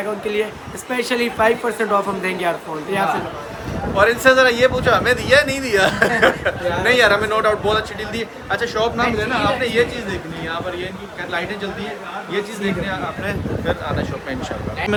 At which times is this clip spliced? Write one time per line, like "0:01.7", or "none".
none